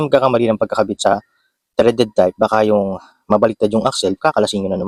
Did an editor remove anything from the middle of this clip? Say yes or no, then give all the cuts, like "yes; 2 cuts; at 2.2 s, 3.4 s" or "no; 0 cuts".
no; 0 cuts